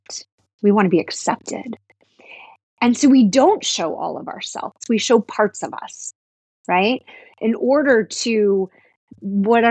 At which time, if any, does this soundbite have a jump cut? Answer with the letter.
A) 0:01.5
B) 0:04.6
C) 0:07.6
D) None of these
B